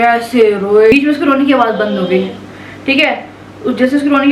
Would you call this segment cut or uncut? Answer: cut